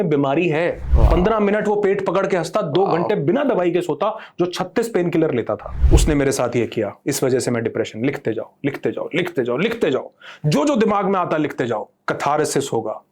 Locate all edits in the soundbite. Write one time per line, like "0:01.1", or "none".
0:00.8
0:05.7